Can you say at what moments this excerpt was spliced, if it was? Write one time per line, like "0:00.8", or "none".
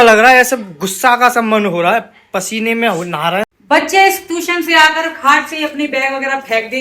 0:03.4